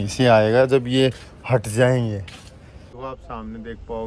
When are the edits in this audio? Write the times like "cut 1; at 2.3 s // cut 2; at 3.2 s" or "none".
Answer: cut 1; at 3.0 s